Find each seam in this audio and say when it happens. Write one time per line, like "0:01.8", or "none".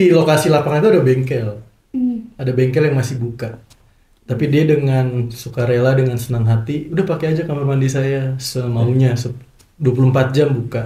none